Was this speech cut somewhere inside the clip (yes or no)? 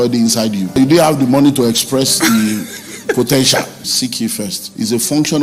yes